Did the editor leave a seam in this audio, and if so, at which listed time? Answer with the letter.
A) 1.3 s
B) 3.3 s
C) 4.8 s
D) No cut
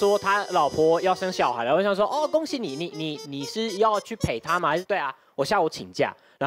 C